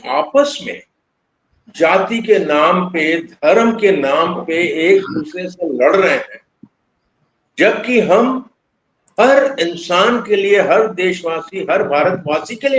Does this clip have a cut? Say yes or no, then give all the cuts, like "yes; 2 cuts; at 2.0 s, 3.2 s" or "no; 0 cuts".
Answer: no; 0 cuts